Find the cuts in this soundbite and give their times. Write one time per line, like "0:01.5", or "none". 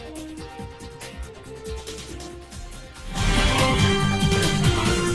0:01.0
0:03.8